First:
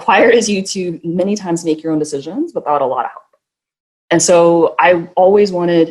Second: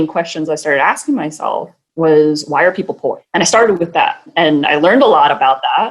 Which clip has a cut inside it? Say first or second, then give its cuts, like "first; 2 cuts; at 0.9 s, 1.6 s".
second; 3 cuts; at 1.8 s, 3.2 s, 4.3 s